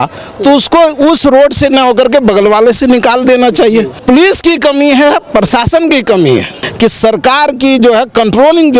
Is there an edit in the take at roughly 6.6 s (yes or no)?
yes